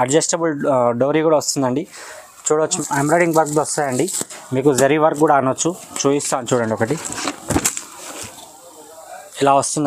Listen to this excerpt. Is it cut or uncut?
cut